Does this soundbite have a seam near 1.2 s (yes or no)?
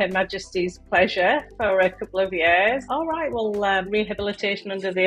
no